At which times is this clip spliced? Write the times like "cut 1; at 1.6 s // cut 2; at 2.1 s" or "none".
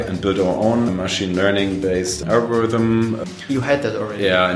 cut 1; at 0.9 s // cut 2; at 2.2 s // cut 3; at 3.2 s